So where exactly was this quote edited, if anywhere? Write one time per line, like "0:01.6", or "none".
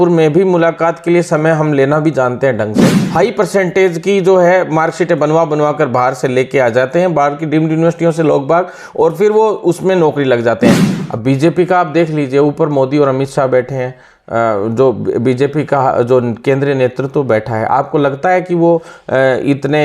0:03.0
0:10.8